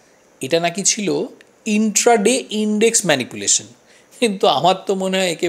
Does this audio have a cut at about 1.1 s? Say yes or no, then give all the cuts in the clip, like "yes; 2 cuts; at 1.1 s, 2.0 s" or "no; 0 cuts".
no; 0 cuts